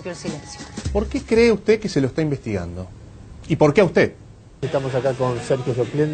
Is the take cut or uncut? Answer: cut